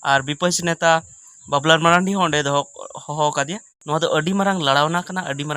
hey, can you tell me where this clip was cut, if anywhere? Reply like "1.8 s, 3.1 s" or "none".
3.7 s